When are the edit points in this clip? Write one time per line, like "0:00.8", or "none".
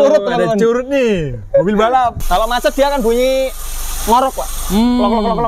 0:02.2